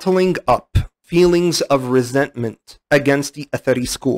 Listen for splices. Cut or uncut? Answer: uncut